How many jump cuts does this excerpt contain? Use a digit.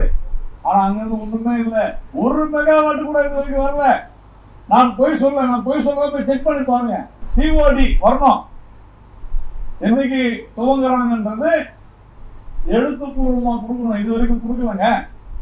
1